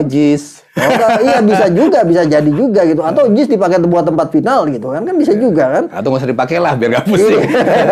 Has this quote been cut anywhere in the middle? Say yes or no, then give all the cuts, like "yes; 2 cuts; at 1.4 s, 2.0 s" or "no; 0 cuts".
no; 0 cuts